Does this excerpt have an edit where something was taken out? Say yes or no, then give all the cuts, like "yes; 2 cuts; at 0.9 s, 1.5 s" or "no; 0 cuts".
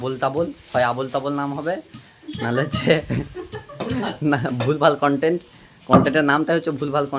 no; 0 cuts